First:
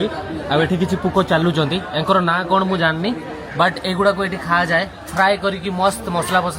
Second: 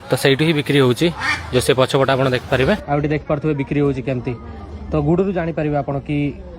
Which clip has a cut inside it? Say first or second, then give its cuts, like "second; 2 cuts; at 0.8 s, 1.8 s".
second; 1 cut; at 3.2 s